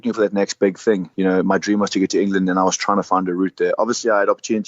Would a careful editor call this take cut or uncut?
uncut